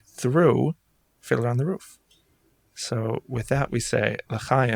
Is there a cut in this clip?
no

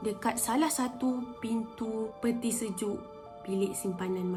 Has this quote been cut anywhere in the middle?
no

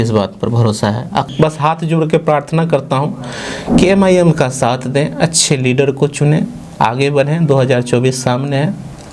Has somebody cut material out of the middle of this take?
yes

